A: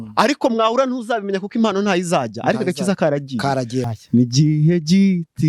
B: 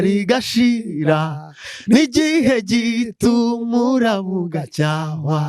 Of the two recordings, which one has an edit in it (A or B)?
A